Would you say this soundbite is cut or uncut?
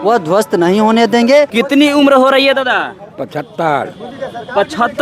cut